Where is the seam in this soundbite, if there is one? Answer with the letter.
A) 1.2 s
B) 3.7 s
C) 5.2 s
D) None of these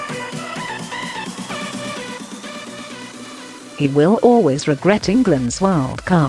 B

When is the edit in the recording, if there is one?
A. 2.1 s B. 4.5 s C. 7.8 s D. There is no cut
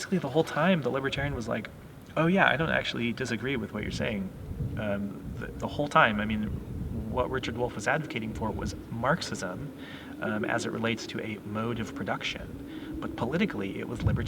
D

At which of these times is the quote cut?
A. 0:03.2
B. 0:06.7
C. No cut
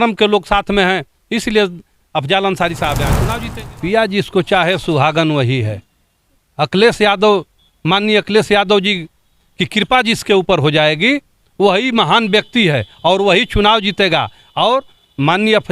A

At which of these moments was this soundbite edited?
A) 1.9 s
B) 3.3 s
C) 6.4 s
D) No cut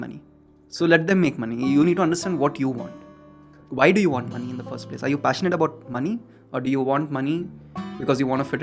D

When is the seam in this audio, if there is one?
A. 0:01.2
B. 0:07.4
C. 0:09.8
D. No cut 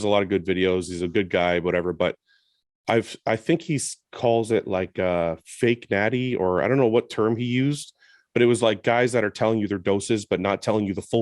C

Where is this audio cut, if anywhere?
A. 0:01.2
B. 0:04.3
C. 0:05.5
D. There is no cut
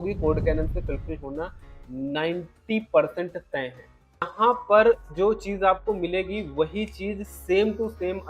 B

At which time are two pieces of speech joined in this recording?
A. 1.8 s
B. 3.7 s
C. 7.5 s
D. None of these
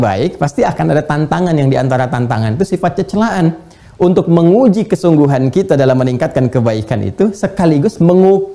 D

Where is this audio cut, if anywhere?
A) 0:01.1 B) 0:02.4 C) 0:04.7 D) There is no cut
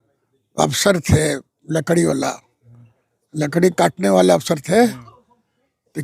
D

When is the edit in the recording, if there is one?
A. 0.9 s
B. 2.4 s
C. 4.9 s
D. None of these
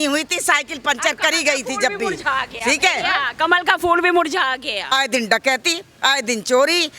C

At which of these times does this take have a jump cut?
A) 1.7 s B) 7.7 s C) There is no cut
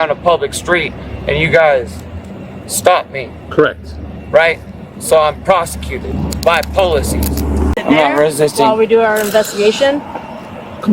B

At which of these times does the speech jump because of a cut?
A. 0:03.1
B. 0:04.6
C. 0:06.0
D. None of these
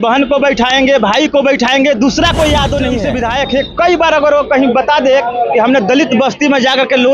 A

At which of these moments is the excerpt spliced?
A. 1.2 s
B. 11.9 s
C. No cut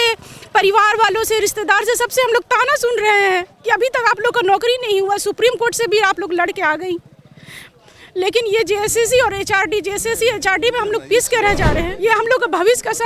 B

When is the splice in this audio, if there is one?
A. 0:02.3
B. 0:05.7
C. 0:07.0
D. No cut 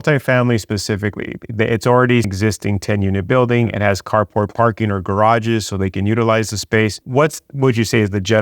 A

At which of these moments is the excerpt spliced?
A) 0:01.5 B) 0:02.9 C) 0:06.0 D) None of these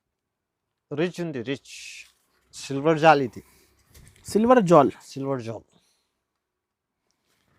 D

